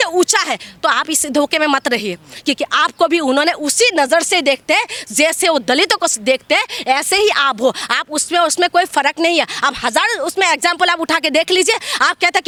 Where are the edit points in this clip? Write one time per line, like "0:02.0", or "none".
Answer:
none